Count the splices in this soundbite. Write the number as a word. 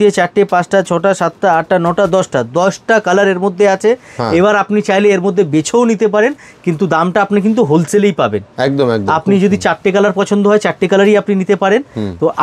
zero